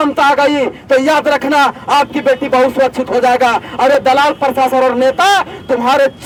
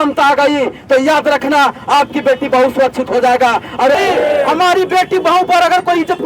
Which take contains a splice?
second; 1 cut; at 3.9 s

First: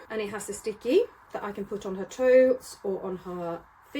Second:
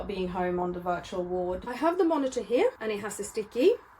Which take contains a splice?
second; 1 cut; at 1.6 s

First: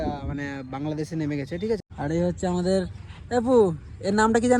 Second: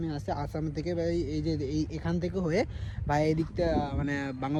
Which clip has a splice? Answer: first; 1 cut; at 1.9 s

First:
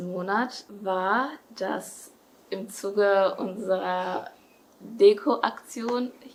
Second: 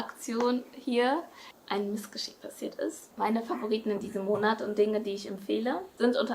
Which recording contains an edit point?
second; 1 cut; at 3.1 s

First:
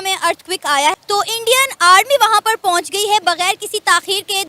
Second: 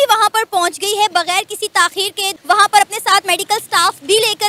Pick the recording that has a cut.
first; 1 cut; at 0.9 s

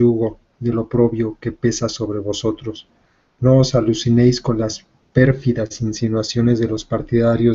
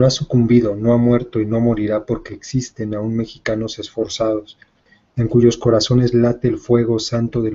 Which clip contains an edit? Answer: first; 1 cut; at 2.6 s

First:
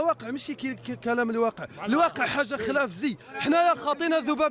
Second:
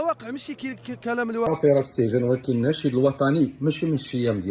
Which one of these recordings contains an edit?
second; 1 cut; at 1.5 s

